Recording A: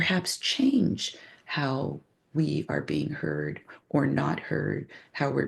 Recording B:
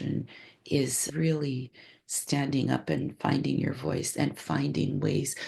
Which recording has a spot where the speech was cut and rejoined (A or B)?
B